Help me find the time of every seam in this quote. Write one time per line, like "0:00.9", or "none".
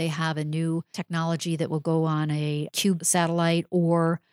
0:01.0
0:02.9

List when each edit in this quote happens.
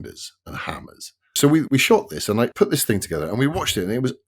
0:01.2
0:02.5

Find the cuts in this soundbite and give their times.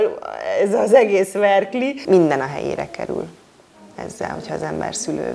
0:02.0

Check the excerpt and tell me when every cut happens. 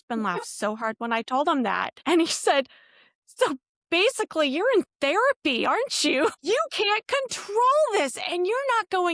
0:01.9
0:06.3

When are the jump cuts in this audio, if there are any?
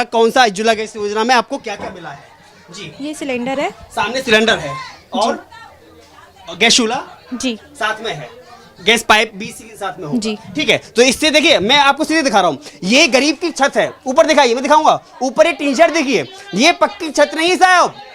none

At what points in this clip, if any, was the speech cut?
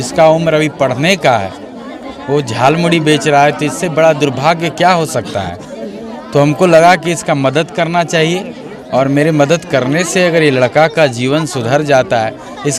none

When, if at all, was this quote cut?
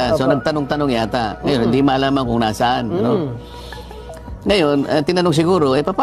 none

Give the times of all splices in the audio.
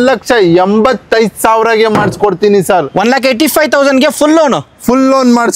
none

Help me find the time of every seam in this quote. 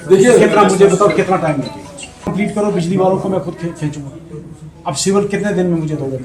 0:02.3

